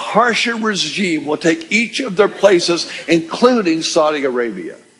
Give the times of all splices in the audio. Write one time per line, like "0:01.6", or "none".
0:02.9